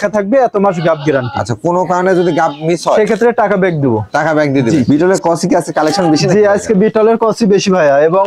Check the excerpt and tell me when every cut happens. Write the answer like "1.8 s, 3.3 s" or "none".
4.8 s